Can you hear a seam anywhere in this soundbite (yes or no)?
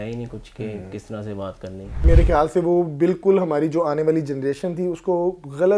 yes